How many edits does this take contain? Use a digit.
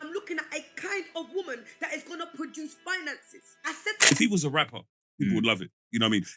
1